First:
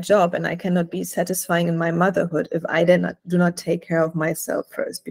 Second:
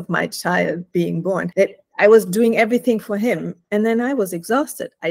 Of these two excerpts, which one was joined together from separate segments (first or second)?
second